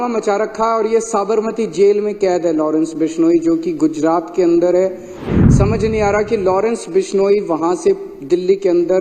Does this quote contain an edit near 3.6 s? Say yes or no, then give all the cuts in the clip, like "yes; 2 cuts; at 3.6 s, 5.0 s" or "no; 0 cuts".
no; 1 cut; at 5.3 s